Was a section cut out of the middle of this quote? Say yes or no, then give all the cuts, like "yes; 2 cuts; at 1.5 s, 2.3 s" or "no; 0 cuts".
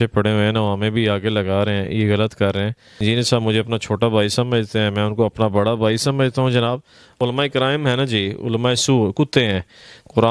yes; 2 cuts; at 3.0 s, 7.1 s